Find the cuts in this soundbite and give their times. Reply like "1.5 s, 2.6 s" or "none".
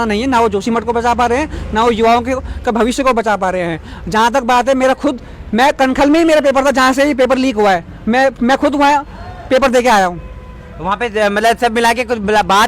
none